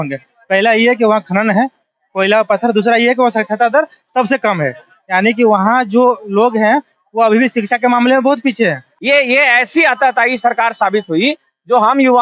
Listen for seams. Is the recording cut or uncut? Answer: cut